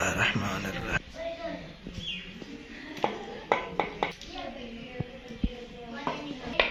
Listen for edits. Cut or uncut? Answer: uncut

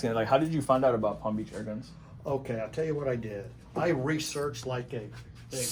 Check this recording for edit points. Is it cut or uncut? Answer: uncut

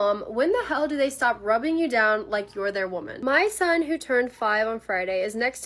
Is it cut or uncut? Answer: uncut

